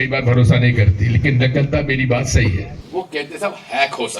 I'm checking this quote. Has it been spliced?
yes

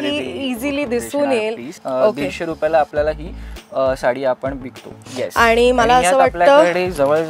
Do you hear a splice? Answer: yes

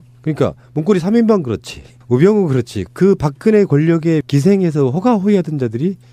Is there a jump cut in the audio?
yes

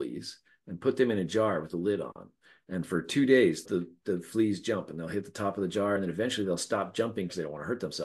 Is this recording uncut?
no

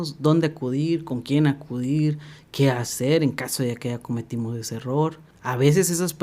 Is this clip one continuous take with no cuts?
no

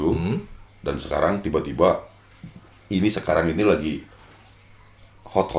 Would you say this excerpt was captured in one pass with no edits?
yes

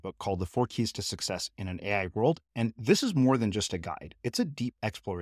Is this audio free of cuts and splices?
yes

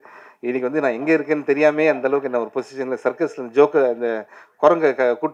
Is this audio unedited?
yes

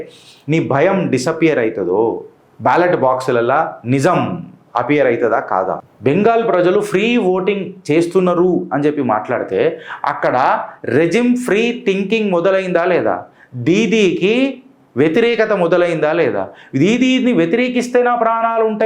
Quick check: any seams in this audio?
yes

